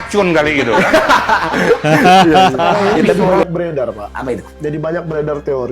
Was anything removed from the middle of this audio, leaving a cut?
yes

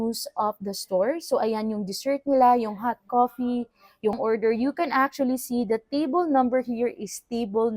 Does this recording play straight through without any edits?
no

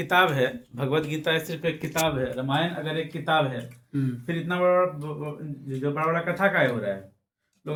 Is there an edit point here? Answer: no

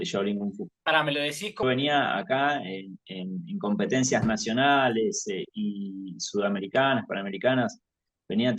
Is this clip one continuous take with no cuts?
no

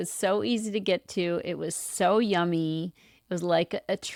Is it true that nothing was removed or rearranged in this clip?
yes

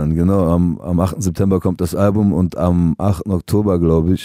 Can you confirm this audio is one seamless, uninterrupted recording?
yes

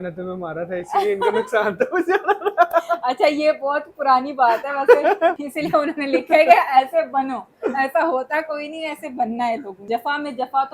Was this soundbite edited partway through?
yes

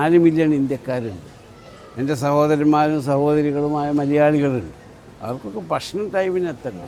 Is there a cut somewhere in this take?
no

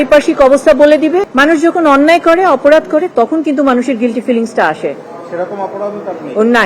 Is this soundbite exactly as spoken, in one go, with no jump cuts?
no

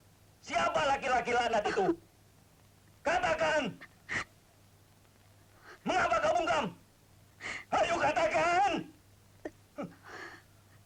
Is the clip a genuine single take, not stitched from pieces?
yes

